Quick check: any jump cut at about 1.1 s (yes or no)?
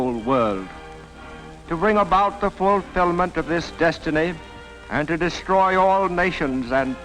no